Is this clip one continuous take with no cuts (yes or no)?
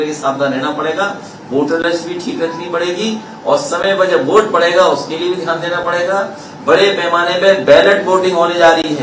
yes